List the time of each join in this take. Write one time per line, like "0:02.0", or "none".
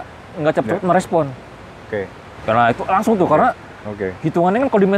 none